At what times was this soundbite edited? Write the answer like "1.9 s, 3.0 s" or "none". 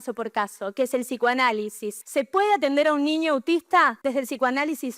1.9 s, 4.0 s